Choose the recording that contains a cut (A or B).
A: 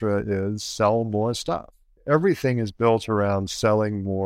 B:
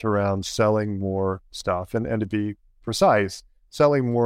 A